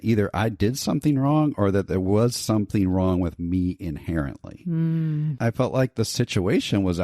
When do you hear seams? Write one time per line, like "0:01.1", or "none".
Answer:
0:05.3